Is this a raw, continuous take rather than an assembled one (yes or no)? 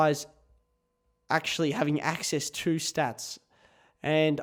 yes